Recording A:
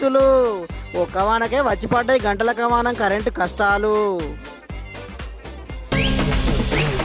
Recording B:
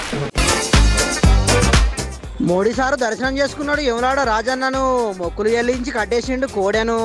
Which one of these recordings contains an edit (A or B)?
A